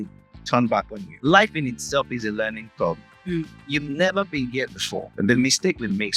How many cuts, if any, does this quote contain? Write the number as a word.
two